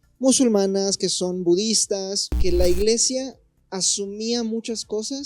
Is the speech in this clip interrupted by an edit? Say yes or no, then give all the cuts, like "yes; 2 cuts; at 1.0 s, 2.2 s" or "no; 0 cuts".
yes; 1 cut; at 2.4 s